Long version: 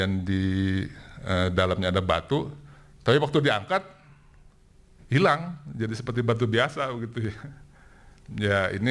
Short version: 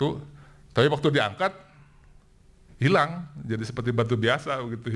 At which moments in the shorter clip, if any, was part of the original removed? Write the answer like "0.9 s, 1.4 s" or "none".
none

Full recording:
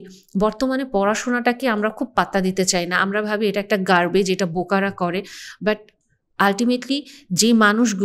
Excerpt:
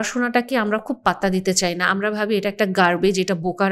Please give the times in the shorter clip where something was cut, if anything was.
none

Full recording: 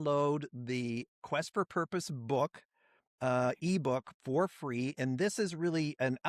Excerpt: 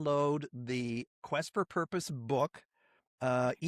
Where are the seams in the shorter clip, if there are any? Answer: none

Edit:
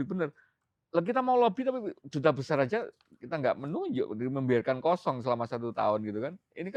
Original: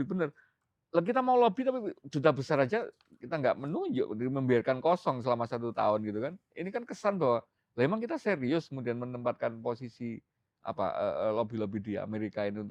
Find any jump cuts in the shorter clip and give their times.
none

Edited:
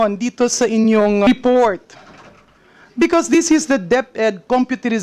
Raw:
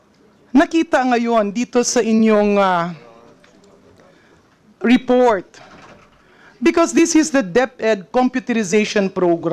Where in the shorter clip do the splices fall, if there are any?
1.3 s

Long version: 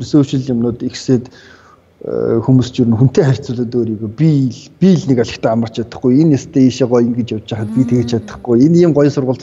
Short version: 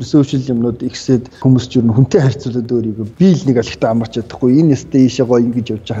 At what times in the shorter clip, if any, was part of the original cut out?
1.4 s, 3.0 s

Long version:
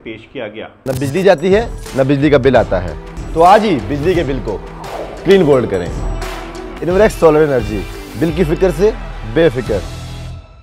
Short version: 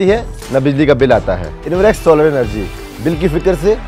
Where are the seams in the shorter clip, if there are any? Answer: 1.5 s

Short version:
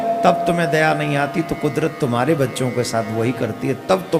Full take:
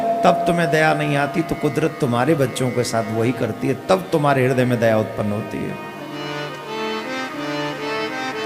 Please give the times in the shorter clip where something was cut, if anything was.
none

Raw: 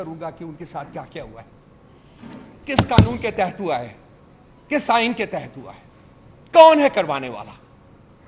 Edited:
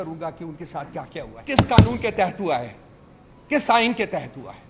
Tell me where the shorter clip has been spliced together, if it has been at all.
1.4 s

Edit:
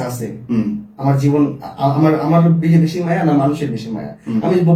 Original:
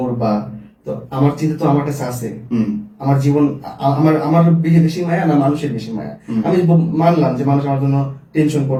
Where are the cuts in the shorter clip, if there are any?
none

